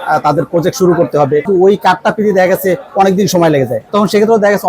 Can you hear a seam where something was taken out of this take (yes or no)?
yes